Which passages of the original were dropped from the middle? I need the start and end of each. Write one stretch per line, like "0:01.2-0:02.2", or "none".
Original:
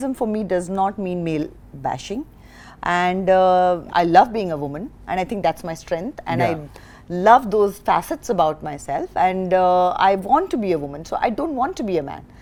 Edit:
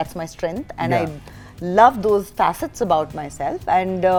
none